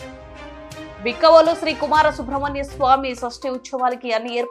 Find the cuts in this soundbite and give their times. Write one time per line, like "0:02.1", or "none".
0:01.0